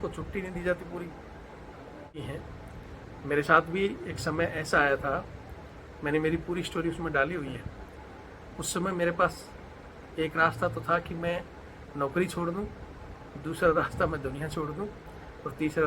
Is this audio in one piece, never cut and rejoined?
no; 1 cut; at 2.2 s

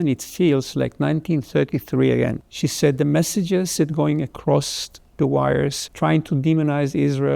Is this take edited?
yes; 2 cuts; at 2.5 s, 5.8 s

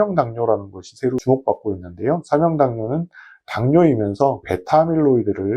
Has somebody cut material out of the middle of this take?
yes; 1 cut; at 1.2 s

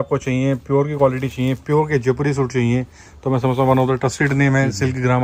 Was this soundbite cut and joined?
no; 0 cuts

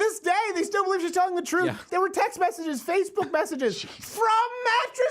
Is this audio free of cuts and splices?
no; 1 cut; at 1.9 s

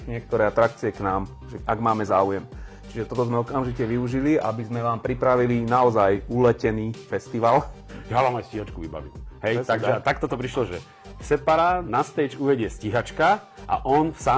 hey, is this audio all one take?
no; 1 cut; at 7.9 s

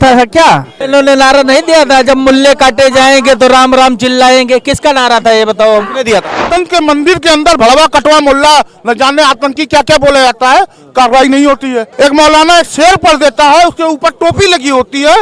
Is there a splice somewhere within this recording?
yes; 3 cuts; at 0.8 s, 6.5 s, 11.8 s

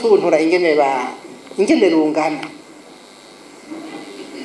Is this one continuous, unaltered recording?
yes; 0 cuts

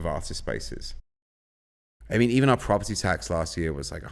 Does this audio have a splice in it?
yes; 1 cut; at 1.6 s

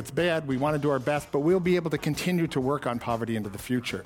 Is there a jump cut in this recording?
no; 0 cuts

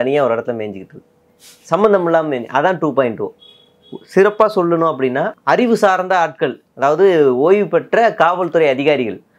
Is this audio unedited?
no; 1 cut; at 5.4 s

